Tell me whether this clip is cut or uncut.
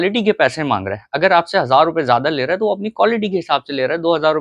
uncut